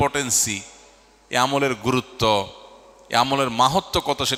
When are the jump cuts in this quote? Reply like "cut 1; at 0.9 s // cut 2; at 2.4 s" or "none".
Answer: none